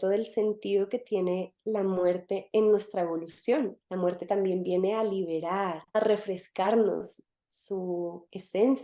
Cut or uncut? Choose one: cut